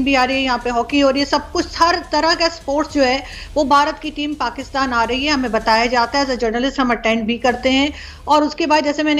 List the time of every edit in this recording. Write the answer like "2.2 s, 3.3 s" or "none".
none